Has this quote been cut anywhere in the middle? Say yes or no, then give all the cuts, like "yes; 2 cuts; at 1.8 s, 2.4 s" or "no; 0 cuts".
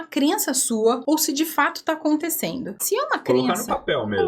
yes; 2 cuts; at 1.0 s, 2.7 s